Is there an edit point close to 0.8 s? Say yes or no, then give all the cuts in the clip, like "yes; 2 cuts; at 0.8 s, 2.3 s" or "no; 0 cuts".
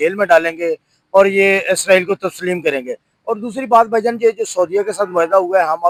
no; 0 cuts